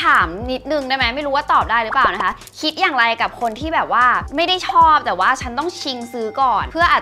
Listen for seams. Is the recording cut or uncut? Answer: uncut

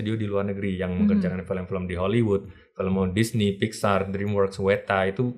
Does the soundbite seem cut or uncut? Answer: uncut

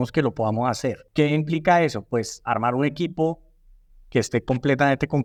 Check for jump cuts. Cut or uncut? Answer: uncut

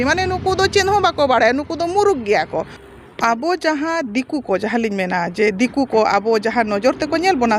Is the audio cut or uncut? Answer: cut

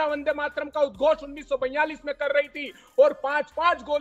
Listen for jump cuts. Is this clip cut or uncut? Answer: uncut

